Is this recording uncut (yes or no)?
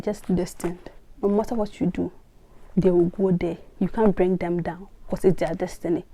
yes